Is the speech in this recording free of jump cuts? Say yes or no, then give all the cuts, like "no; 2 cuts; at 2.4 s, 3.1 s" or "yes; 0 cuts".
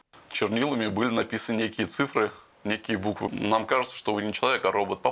no; 1 cut; at 3.3 s